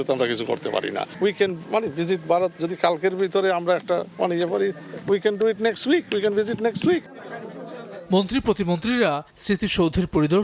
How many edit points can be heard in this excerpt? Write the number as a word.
zero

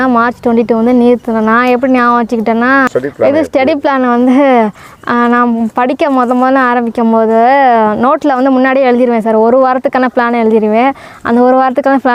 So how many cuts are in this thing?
one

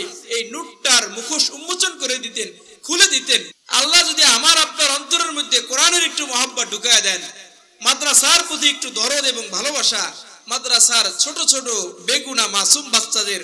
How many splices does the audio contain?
one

